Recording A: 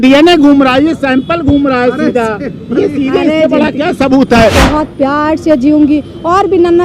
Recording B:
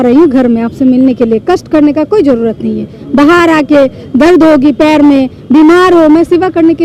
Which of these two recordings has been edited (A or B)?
A